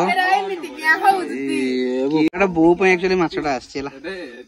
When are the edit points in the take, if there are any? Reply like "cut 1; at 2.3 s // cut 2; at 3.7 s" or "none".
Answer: cut 1; at 2.3 s